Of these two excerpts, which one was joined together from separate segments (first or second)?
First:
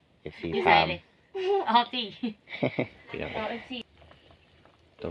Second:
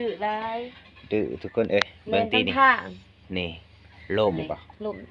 first